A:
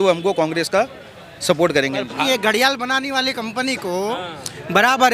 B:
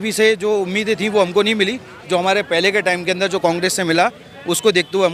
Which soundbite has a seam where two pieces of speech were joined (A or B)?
A